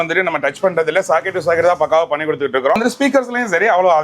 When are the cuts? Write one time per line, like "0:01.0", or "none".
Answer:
0:02.8